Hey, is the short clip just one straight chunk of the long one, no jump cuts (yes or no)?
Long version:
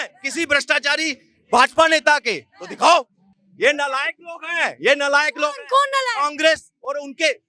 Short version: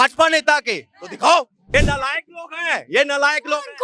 no